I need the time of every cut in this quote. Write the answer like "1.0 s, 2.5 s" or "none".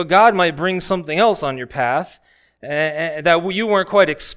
none